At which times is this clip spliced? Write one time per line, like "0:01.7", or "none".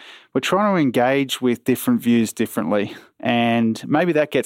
0:03.0